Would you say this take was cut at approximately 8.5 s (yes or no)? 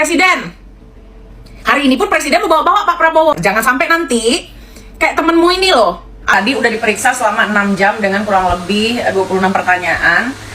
no